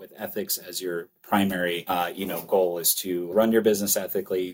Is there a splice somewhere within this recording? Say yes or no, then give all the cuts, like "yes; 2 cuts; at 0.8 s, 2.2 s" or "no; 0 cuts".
yes; 3 cuts; at 1.2 s, 1.8 s, 3.3 s